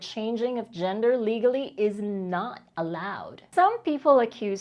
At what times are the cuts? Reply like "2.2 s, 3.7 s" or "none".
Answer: 3.4 s